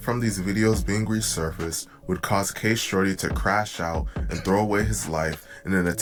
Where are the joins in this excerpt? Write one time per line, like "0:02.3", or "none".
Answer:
none